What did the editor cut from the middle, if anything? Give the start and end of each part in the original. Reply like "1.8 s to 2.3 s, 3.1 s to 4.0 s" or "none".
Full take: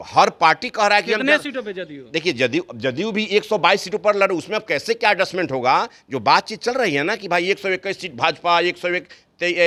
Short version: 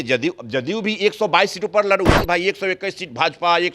4.5 s to 7.2 s